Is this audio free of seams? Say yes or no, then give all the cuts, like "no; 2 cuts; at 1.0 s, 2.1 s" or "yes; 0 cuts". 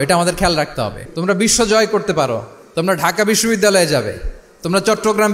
no; 1 cut; at 1.0 s